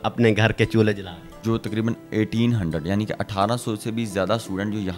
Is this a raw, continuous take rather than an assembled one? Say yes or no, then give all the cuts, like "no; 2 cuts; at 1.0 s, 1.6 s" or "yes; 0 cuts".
no; 1 cut; at 1.3 s